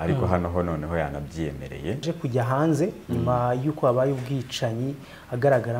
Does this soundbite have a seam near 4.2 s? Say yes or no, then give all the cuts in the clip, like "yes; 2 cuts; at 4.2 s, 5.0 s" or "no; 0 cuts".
no; 1 cut; at 2.0 s